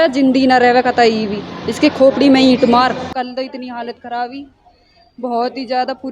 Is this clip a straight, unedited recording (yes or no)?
no